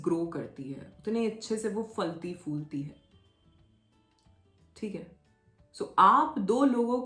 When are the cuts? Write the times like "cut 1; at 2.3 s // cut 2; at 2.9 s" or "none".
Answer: none

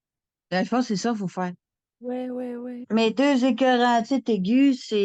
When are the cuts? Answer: cut 1; at 2.8 s

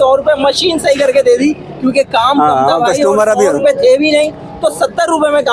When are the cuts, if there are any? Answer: none

